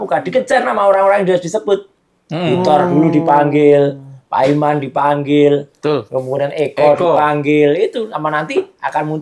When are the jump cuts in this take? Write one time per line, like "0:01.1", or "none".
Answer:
none